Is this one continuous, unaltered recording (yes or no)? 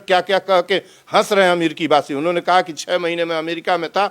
yes